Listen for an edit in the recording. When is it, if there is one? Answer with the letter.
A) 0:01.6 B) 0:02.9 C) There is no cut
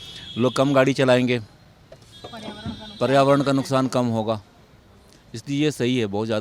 C